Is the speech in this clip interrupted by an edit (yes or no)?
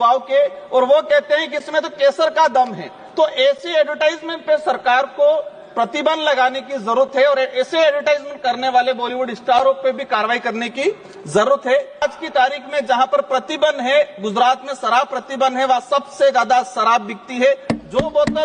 yes